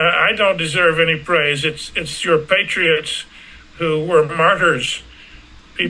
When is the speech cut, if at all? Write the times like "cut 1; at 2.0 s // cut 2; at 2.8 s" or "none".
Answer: none